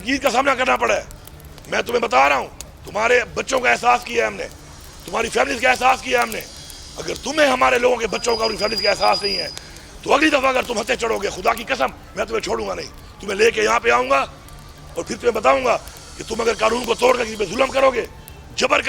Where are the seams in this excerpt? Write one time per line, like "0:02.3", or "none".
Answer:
none